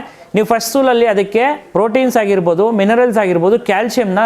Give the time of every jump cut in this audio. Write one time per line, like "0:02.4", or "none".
0:01.6